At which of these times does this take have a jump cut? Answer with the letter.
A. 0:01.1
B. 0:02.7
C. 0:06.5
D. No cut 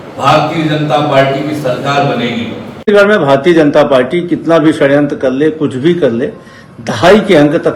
B